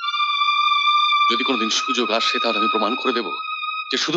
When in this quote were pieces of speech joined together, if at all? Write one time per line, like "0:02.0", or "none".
none